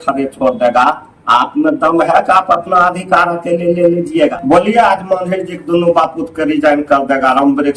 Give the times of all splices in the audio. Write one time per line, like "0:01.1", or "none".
0:04.3